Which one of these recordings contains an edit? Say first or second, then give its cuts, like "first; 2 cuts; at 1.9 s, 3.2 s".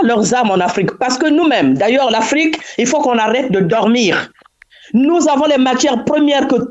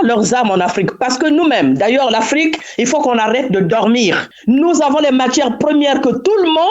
second; 1 cut; at 4.3 s